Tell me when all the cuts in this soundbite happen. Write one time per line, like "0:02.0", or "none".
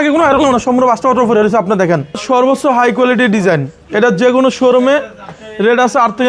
0:02.2